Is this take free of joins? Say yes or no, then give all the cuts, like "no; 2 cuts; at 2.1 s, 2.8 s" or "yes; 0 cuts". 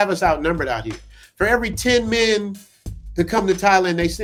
yes; 0 cuts